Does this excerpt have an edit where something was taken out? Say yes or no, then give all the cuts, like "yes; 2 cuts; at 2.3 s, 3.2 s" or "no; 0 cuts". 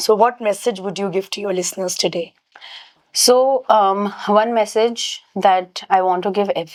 no; 0 cuts